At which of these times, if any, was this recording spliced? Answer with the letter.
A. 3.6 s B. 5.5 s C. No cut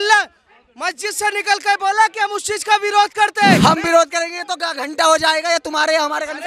A